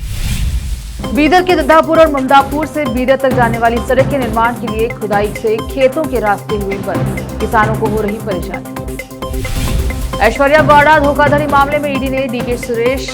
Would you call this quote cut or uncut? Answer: cut